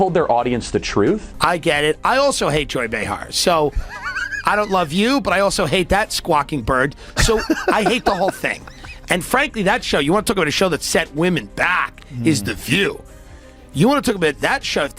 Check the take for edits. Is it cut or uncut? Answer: cut